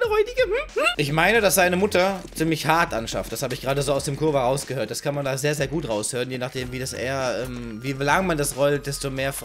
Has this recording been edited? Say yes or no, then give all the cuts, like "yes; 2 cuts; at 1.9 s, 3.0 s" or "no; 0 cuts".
yes; 1 cut; at 1.0 s